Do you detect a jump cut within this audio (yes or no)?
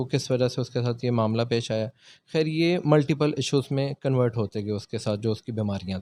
no